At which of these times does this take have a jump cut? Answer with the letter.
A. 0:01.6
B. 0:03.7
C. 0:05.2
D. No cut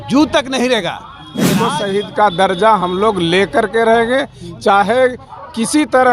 A